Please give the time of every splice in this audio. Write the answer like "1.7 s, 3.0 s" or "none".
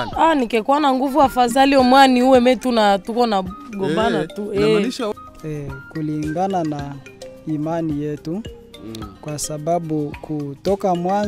5.1 s